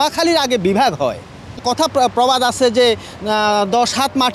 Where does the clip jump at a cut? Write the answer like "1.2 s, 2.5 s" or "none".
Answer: 1.6 s